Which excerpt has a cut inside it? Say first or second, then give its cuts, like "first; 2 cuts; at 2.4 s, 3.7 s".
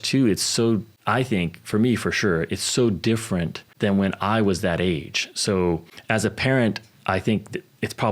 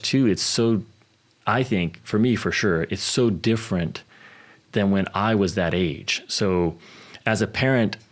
first; 3 cuts; at 0.9 s, 3.6 s, 5.9 s